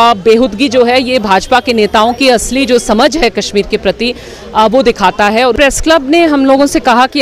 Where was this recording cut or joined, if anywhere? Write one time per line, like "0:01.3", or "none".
0:05.6